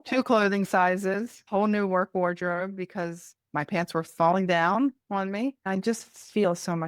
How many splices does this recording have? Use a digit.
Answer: 2